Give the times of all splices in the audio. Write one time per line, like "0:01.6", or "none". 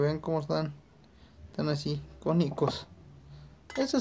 none